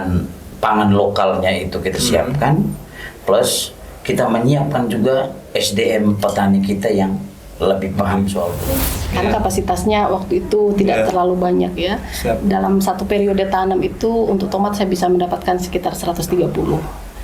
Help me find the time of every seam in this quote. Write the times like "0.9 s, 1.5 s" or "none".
8.7 s